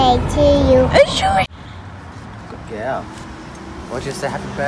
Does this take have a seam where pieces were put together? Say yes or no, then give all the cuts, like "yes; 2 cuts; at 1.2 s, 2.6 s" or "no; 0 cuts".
yes; 1 cut; at 1.5 s